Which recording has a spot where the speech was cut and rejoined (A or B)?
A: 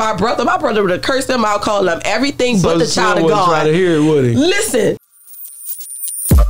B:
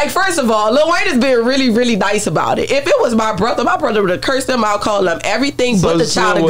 A